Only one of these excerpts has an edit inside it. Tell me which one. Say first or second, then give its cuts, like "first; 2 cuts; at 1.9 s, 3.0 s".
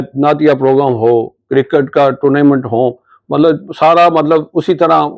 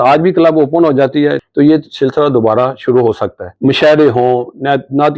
second; 2 cuts; at 1.4 s, 3.4 s